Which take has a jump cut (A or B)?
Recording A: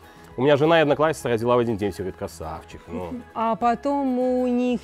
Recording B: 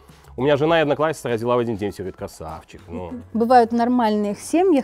B